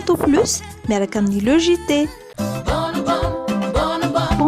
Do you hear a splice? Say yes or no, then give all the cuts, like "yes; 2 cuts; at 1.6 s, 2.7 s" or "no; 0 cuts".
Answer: no; 0 cuts